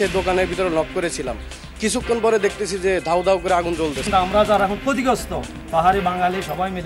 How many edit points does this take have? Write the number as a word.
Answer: one